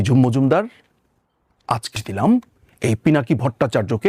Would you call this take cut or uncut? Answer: cut